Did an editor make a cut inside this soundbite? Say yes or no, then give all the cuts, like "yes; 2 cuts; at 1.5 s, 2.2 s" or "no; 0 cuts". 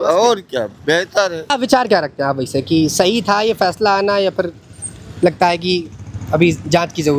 yes; 1 cut; at 1.4 s